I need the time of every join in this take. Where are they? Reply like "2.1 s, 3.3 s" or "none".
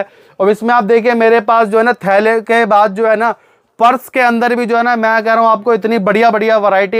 none